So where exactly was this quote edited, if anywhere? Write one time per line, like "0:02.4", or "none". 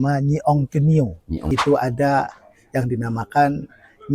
0:01.3